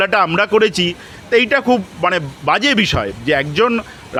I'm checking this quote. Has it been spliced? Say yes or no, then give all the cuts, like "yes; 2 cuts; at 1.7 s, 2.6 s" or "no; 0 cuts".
no; 0 cuts